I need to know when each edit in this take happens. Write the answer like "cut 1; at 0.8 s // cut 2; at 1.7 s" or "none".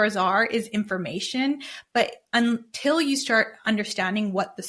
none

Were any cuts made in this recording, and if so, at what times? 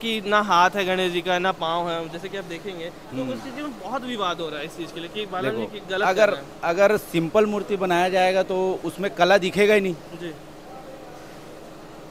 none

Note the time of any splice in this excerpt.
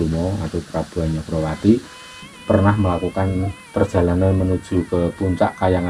cut 1; at 2.3 s

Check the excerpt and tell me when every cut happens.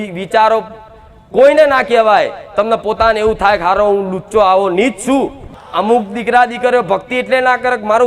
cut 1; at 5.4 s

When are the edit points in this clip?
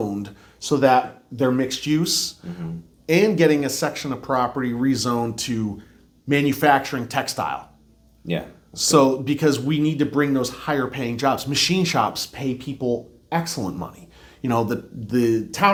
none

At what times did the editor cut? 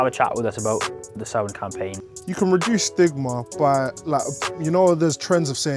cut 1; at 2.0 s

